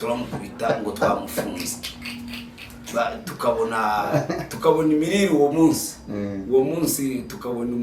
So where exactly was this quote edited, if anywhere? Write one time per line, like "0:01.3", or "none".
none

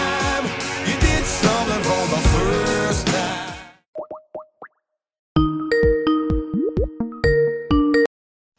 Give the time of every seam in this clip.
0:03.8

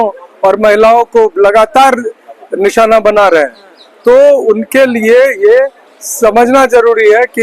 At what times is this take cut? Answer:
none

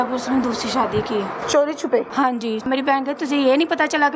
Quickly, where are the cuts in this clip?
0:01.4
0:02.7

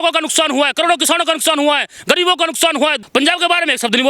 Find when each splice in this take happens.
0:03.0

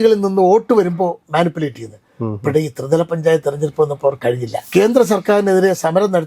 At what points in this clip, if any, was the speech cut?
0:04.5

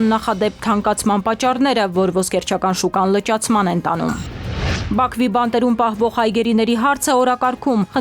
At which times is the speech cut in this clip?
0:04.7

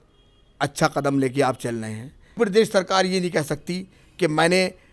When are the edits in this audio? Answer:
0:02.4

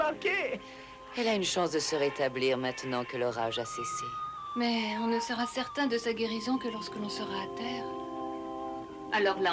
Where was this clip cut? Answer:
none

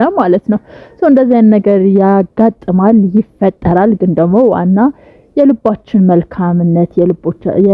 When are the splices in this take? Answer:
none

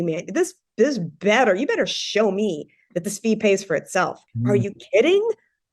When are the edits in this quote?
0:04.2

